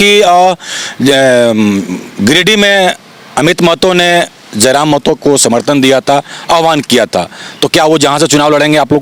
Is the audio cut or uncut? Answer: uncut